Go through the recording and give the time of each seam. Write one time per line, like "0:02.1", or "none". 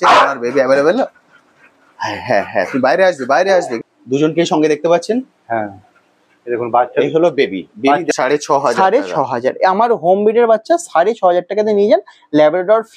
0:03.7
0:08.1